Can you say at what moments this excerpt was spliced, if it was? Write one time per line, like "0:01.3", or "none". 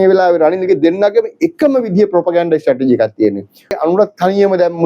0:03.8